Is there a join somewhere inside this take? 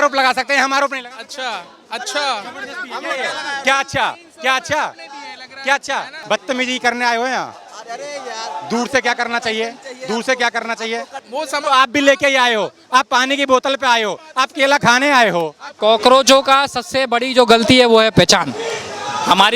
yes; 3 cuts; at 6.1 s, 11.2 s, 15.6 s

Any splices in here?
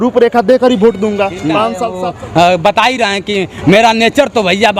yes; 1 cut; at 1.9 s

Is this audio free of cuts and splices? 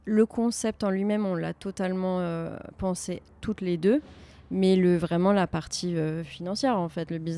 yes; 0 cuts

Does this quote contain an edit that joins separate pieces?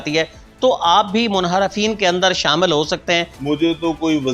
yes; 1 cut; at 3.3 s

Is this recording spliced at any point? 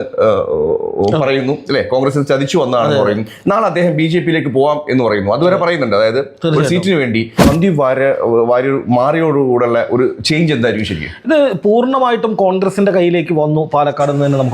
yes; 1 cut; at 7.5 s

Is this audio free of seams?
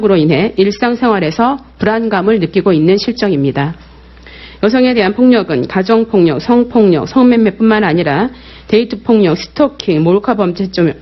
no; 1 cut; at 1.0 s

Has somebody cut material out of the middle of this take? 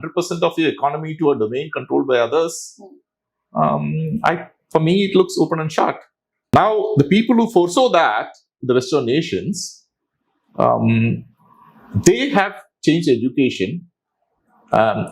yes; 1 cut; at 6.5 s

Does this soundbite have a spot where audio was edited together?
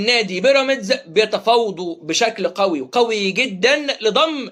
no; 0 cuts

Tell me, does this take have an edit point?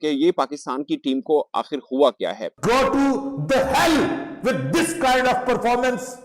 yes; 1 cut; at 2.4 s

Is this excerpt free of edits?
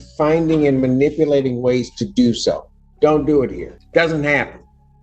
no; 1 cut; at 3.7 s

